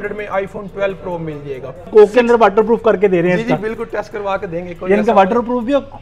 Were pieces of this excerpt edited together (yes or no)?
yes